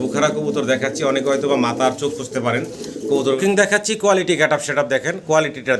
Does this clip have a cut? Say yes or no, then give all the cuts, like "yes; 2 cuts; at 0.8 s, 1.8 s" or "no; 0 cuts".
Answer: yes; 1 cut; at 3.4 s